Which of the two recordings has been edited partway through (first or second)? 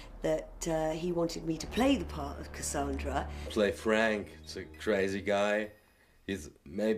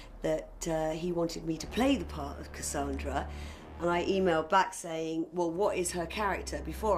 second